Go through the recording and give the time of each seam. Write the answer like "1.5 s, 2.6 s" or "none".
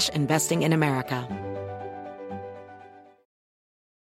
1.2 s